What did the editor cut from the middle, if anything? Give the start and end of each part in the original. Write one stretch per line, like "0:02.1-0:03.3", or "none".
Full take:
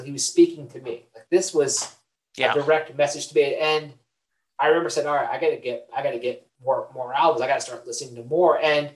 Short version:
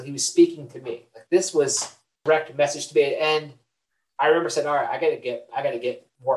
0:02.2-0:02.6